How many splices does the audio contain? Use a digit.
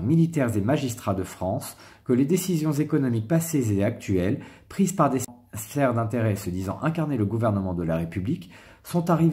1